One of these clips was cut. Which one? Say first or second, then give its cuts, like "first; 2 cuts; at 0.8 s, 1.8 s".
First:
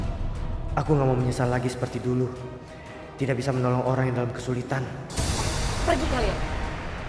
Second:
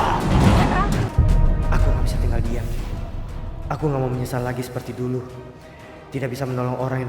second; 1 cut; at 1.1 s